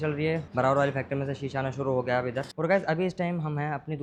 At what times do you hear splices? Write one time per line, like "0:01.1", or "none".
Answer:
none